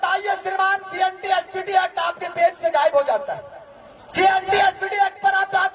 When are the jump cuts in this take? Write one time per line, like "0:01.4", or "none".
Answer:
none